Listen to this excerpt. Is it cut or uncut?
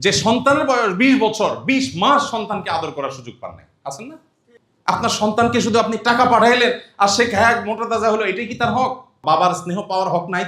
cut